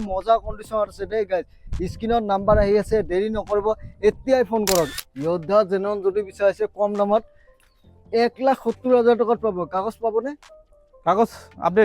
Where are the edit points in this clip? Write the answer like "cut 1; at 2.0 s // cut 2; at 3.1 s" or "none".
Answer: cut 1; at 4.9 s